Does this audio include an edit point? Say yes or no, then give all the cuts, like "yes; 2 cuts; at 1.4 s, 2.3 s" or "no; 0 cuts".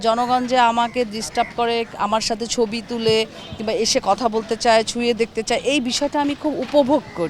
yes; 1 cut; at 1.9 s